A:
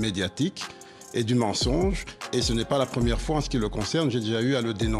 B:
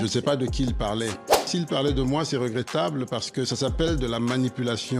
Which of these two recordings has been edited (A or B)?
B